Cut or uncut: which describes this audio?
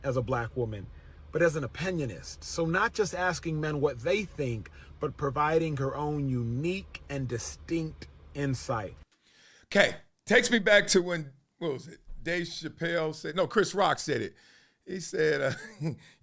uncut